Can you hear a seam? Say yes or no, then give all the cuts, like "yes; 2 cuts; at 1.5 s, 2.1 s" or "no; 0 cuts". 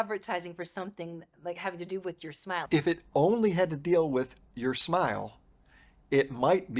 yes; 1 cut; at 2.7 s